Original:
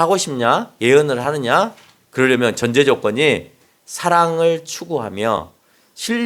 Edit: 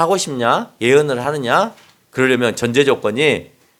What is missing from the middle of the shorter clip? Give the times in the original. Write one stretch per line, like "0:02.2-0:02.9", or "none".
none

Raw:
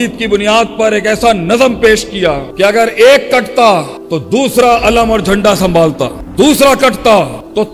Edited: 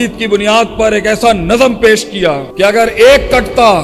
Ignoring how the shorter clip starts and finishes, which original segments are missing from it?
none

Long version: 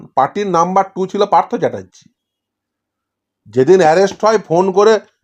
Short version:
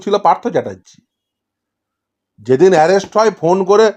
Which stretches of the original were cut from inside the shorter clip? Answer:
none

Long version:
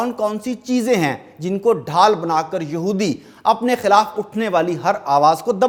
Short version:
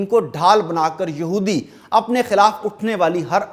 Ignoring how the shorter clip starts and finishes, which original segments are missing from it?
none

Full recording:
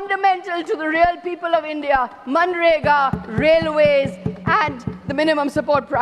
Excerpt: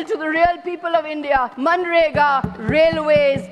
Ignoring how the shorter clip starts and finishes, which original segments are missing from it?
0:02.1-0:02.2

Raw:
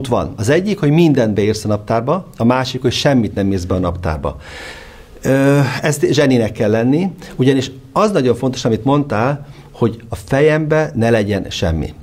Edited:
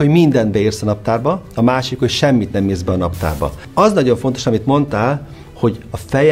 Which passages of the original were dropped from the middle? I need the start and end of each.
0:04.4-0:07.8

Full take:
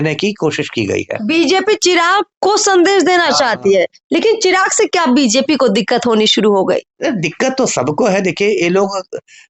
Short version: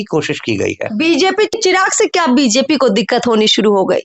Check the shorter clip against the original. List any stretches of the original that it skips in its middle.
0:01.8-0:04.3

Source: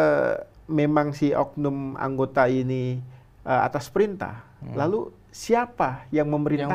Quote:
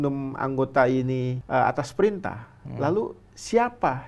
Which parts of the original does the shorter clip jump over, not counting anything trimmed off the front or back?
0:03.0-0:03.3

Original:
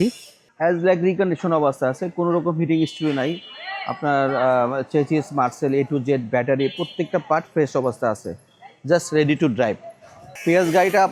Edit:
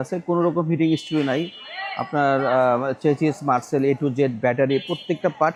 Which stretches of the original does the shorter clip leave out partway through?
none

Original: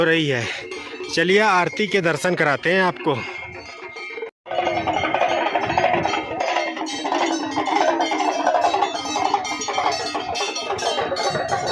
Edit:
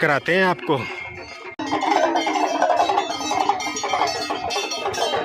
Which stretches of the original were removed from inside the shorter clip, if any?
0:04.0-0:07.5

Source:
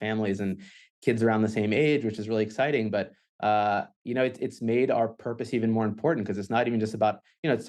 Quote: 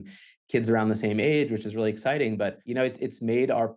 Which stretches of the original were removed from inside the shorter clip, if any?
0:03.1-0:04.0

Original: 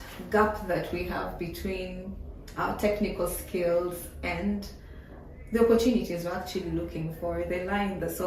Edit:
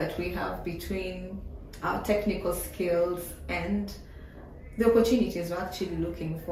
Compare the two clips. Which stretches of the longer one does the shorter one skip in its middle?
none

